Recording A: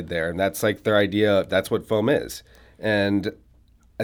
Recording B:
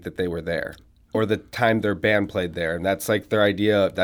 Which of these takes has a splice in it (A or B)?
B